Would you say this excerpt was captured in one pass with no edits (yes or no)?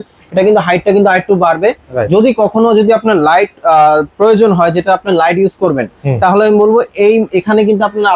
yes